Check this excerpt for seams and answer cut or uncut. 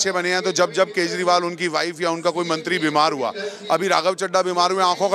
uncut